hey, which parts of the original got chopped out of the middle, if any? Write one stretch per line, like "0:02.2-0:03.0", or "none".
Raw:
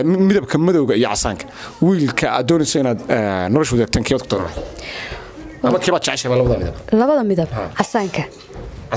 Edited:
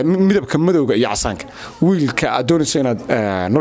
none

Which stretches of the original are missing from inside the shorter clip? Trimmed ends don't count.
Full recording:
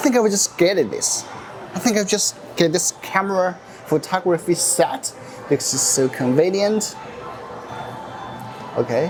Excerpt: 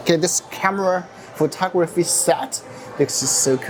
none

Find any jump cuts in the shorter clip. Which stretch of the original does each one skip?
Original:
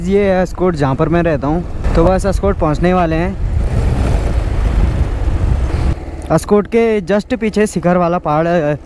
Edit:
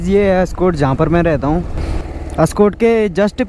0:01.8-0:05.7

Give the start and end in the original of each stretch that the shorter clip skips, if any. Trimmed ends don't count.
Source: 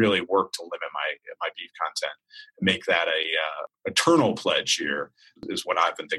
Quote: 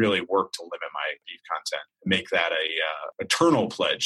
0:01.7-0:02.2
0:03.6-0:03.8

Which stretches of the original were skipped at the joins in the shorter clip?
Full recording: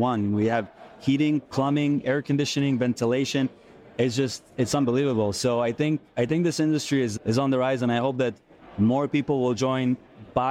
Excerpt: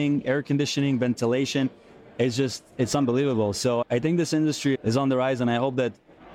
0:05.6-0:06.1
0:07.1-0:07.2

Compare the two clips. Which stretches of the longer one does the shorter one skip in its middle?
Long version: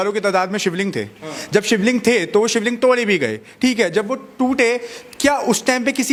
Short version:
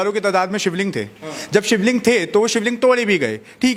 none

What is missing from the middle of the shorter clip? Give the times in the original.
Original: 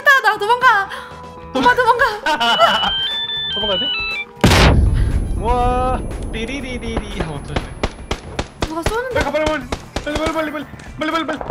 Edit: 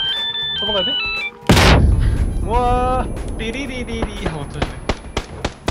none

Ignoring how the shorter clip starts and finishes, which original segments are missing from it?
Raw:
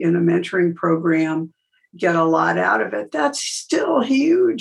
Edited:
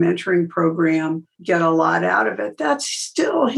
0:01.6-0:01.8

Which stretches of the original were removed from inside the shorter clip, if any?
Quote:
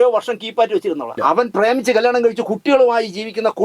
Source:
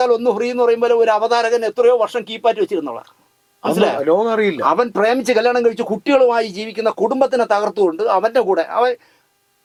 0:03.0-0:04.6

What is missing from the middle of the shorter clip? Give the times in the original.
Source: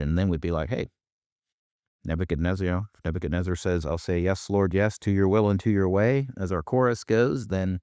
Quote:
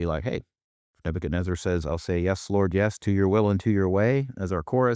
0:01.4-0:02.9

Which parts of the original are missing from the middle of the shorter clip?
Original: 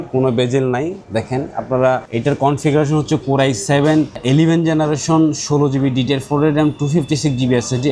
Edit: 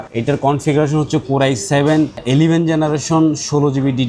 none

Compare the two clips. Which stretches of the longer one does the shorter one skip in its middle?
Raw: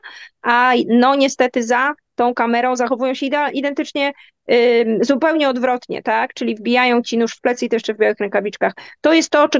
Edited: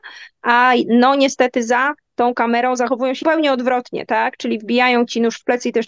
0:03.2-0:05.2

